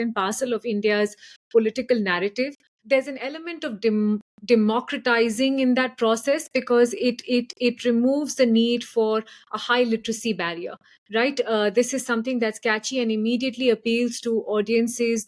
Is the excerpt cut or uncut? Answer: cut